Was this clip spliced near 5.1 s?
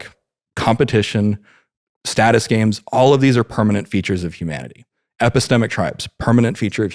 no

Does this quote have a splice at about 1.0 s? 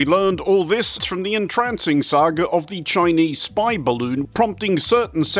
yes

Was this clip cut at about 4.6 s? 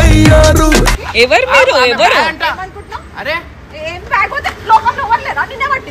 no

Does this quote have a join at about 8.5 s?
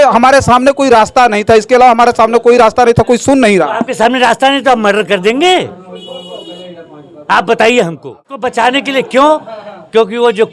yes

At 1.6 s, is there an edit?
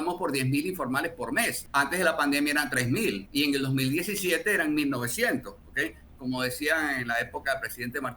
yes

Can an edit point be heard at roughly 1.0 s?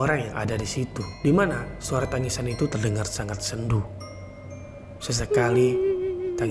yes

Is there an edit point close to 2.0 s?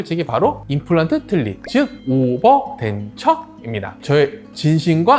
no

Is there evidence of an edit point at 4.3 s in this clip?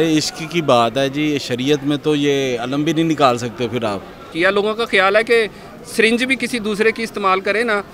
yes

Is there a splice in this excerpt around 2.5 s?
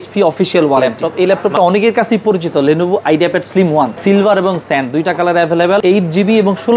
no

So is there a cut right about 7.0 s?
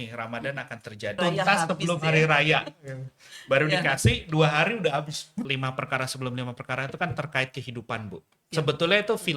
no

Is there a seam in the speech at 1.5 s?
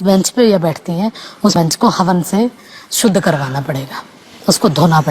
yes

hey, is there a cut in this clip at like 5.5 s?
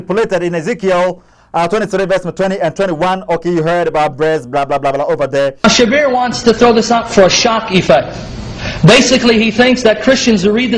yes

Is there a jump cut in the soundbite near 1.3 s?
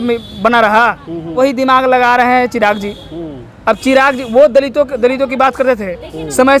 yes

